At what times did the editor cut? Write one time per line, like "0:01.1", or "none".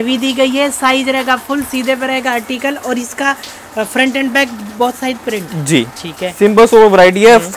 none